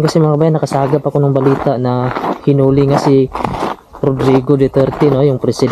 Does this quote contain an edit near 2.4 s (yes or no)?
no